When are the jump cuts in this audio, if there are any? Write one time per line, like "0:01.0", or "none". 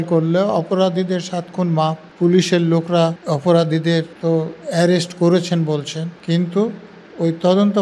0:02.0
0:03.2
0:04.1
0:06.1